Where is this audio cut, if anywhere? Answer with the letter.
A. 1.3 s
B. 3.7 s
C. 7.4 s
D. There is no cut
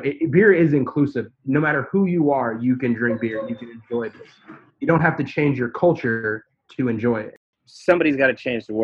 C